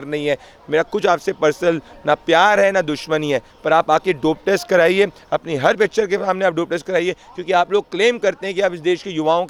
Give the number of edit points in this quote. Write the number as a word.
zero